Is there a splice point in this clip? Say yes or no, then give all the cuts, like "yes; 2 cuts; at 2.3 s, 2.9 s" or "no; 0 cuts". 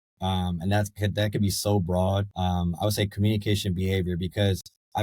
yes; 1 cut; at 2.3 s